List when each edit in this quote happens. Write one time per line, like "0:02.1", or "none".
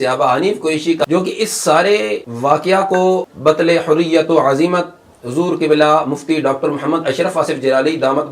0:01.0
0:02.3
0:03.2